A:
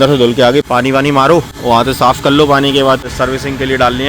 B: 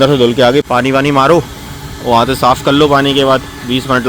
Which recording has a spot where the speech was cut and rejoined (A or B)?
A